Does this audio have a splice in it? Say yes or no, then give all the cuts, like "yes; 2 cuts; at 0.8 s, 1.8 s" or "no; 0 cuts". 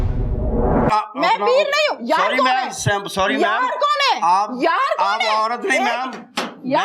yes; 1 cut; at 1.1 s